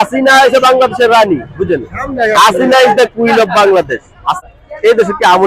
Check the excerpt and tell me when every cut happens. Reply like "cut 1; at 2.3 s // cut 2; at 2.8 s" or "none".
cut 1; at 4.4 s